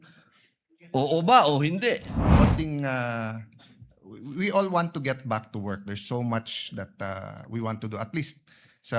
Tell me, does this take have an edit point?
yes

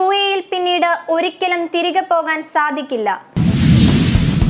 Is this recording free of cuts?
no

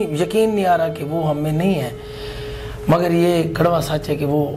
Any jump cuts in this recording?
no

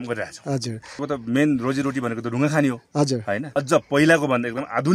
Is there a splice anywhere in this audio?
yes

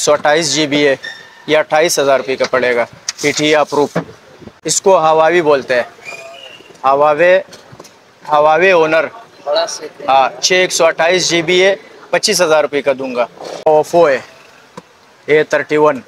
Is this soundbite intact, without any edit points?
no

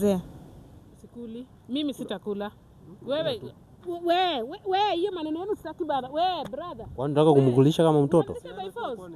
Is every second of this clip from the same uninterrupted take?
no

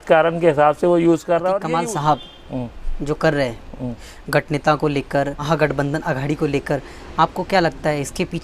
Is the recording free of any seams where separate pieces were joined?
no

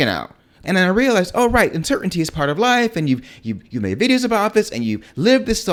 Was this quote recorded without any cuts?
yes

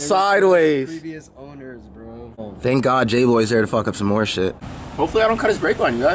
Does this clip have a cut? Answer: yes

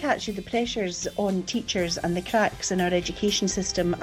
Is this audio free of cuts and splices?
yes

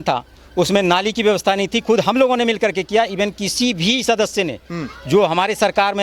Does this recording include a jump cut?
no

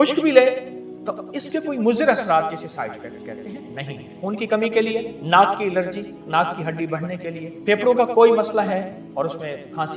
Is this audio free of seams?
no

